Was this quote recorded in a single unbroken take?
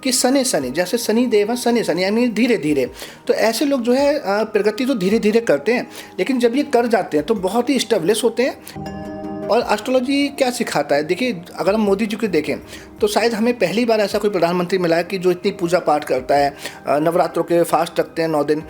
no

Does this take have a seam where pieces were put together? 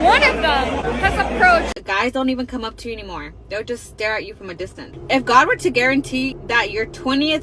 yes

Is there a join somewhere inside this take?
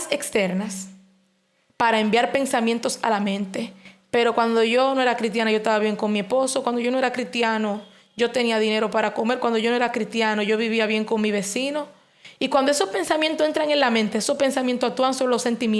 no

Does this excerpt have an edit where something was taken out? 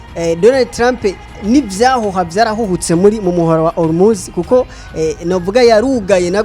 yes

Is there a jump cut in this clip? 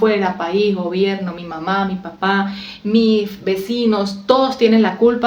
no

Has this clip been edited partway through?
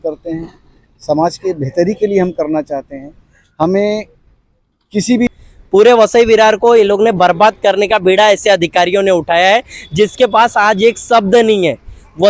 yes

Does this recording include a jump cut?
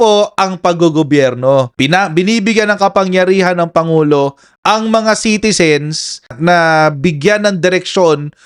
no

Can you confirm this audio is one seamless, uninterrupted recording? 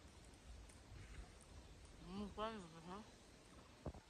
yes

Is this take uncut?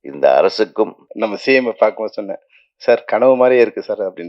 no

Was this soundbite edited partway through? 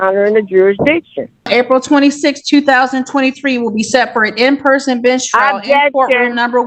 yes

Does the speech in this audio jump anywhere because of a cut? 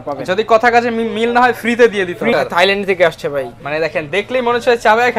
yes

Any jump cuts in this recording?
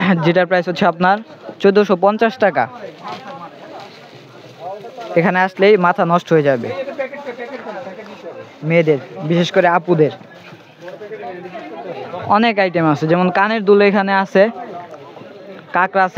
no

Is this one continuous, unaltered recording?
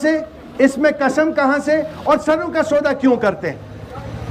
yes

